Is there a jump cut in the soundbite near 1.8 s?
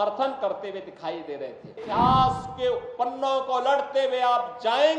yes; 1 cut; at 1.8 s

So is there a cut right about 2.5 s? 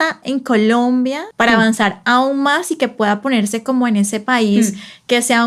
no; 1 cut; at 1.2 s

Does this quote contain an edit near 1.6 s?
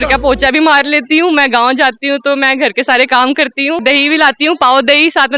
no; 1 cut; at 3.8 s

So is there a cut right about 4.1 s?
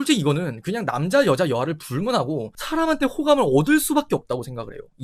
no; 1 cut; at 2.5 s

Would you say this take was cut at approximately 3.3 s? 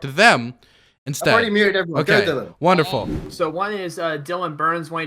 yes; 1 cut; at 3.3 s

